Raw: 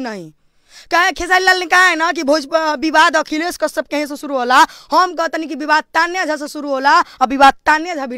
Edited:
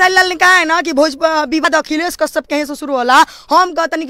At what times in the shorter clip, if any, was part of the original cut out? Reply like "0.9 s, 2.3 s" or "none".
1.6 s